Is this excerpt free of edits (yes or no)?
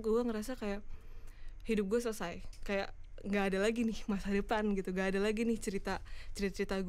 yes